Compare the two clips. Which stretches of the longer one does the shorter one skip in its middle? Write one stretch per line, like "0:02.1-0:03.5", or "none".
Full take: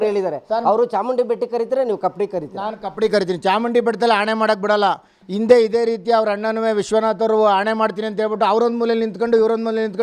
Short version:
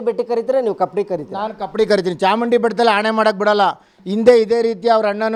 none